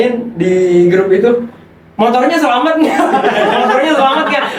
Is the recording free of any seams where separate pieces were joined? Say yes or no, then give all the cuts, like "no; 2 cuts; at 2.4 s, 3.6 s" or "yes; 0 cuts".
yes; 0 cuts